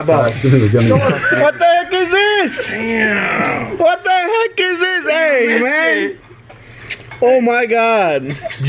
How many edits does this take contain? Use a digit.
1